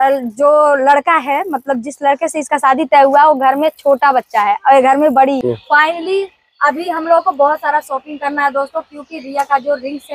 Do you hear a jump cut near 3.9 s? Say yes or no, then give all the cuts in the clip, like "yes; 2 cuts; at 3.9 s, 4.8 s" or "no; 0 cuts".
no; 1 cut; at 5.4 s